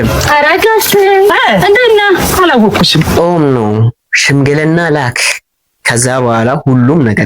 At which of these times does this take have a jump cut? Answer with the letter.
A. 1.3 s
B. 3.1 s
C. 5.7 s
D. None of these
B